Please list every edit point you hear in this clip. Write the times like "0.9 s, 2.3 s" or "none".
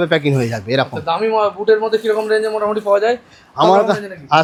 none